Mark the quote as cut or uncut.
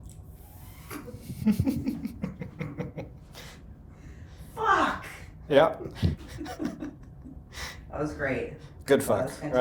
uncut